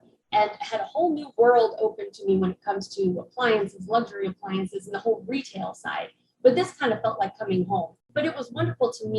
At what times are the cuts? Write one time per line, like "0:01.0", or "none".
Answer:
0:08.1